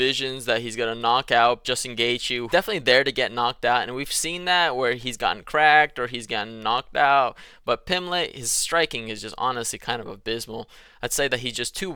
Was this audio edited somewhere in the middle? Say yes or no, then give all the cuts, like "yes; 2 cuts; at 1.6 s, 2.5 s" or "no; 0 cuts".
no; 0 cuts